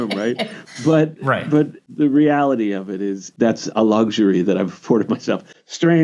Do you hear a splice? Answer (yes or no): yes